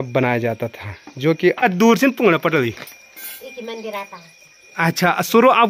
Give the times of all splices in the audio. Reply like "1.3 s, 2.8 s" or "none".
1.6 s